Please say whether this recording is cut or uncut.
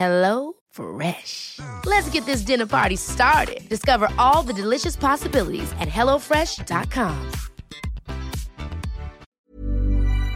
cut